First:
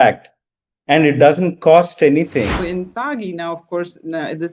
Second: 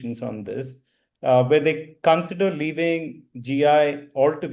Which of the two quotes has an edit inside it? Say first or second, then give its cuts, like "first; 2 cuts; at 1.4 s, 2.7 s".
first; 1 cut; at 2.6 s